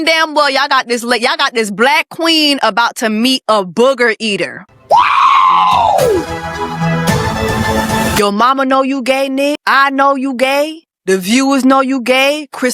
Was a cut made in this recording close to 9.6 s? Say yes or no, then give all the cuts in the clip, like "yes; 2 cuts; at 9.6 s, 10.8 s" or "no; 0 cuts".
yes; 4 cuts; at 4.6 s, 8.2 s, 9.6 s, 10.9 s